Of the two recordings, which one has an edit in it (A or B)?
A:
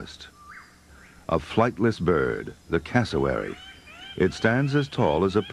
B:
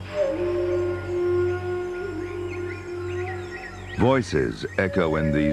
B